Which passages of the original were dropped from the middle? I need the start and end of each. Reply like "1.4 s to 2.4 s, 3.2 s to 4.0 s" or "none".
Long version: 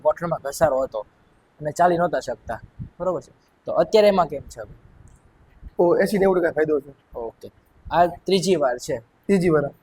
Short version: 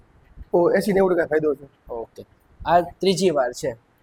none